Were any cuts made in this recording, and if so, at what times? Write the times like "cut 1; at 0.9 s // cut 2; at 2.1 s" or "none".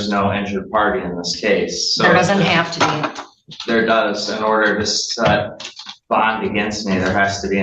none